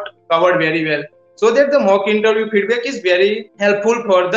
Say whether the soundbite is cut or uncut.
uncut